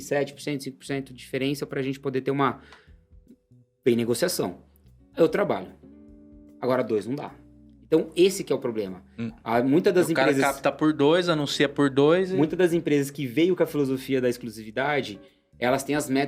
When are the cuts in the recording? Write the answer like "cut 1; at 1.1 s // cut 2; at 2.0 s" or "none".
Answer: none